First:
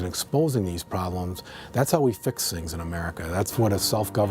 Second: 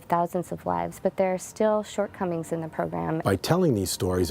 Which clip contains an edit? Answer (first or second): second